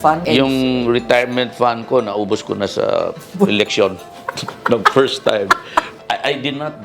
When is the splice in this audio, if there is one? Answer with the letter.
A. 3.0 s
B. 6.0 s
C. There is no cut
B